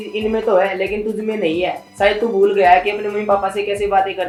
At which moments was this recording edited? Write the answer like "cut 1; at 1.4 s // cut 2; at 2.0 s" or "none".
none